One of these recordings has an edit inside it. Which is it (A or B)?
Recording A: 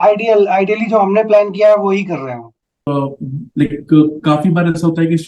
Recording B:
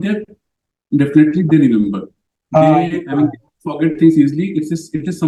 A